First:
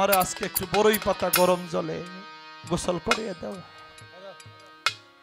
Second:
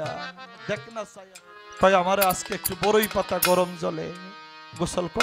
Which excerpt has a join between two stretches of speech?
second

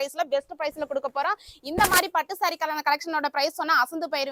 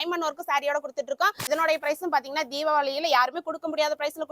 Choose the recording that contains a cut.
second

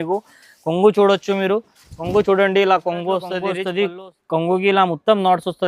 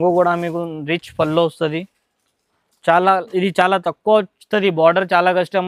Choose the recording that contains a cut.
first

